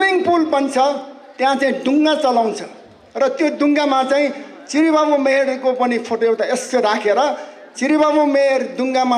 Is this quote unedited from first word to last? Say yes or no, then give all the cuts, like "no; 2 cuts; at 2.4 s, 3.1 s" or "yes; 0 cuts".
yes; 0 cuts